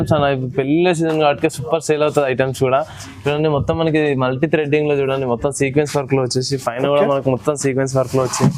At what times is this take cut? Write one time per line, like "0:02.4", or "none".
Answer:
none